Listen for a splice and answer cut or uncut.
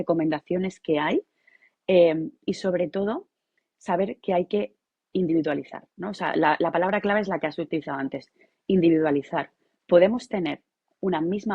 uncut